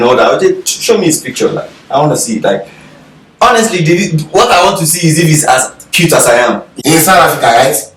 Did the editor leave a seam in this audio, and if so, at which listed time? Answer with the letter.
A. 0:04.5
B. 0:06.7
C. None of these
B